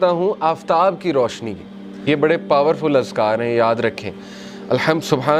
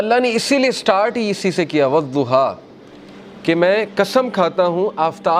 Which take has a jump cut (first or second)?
first